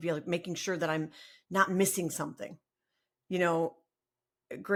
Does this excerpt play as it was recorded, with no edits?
yes; 0 cuts

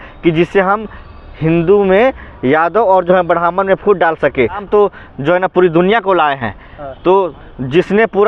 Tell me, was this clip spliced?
yes; 1 cut; at 4.6 s

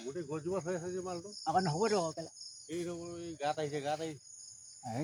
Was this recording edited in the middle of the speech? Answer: no; 0 cuts

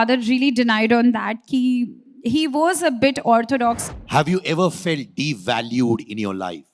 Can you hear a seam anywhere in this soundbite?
yes; 1 cut; at 3.9 s

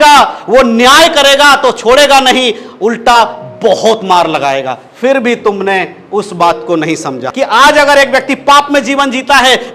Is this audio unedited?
no; 1 cut; at 7.2 s

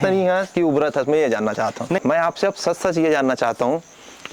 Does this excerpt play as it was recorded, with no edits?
no; 1 cut; at 2.0 s

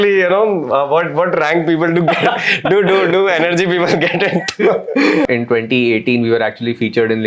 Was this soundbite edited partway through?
yes; 1 cut; at 5.3 s

